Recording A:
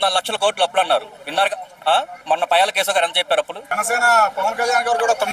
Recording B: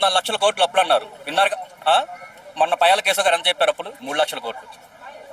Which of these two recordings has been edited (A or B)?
A